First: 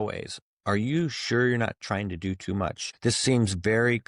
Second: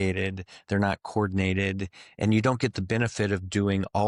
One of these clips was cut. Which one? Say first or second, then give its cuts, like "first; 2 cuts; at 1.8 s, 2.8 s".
first; 1 cut; at 2.9 s